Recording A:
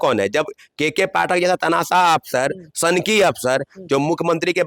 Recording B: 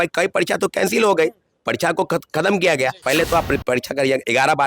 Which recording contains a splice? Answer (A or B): B